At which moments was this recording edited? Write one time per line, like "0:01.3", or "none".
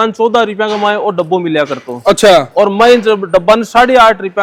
none